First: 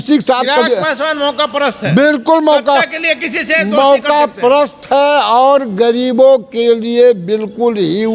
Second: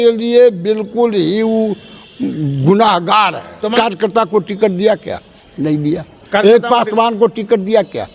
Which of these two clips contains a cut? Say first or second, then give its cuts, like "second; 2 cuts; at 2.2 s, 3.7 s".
second; 1 cut; at 3.7 s